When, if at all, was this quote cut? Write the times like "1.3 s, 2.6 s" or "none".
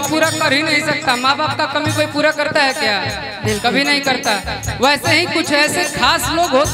none